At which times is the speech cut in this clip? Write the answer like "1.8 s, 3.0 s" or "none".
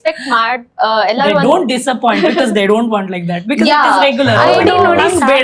none